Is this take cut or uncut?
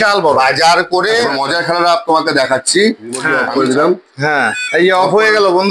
cut